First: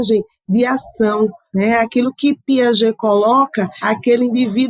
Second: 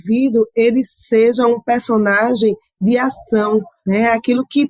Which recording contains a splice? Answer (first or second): first